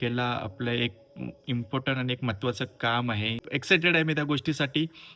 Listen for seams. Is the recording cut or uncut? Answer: cut